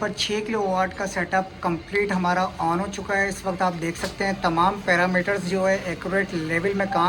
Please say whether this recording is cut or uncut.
uncut